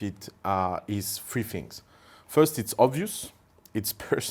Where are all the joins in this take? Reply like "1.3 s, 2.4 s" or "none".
none